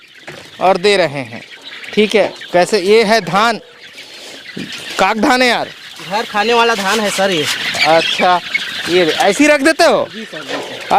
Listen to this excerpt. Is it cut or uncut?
uncut